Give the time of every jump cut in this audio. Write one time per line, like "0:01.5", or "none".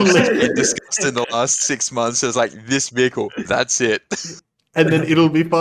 none